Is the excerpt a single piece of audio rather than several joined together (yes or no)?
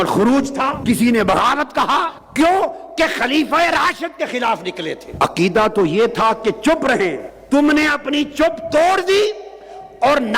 no